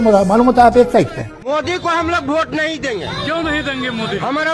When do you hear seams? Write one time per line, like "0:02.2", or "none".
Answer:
0:01.2